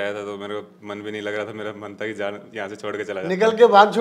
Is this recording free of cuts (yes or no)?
yes